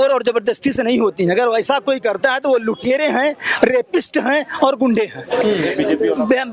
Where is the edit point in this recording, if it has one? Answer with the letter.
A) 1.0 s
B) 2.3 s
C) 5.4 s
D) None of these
D